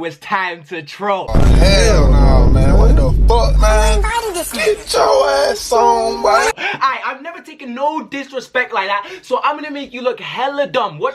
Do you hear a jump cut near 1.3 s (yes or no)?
no